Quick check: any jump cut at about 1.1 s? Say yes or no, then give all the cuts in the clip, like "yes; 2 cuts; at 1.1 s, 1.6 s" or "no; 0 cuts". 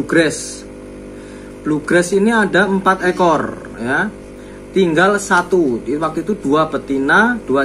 no; 0 cuts